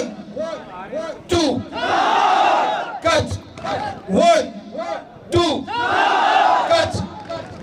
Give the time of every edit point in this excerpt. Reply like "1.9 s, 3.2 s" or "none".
none